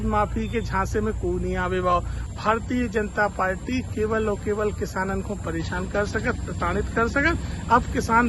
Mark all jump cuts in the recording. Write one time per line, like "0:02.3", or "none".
0:02.2